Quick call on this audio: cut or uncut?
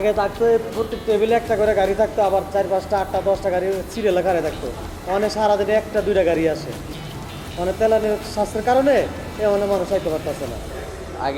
uncut